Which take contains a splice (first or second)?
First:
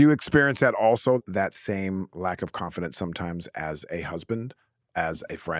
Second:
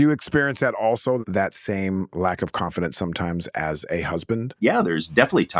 second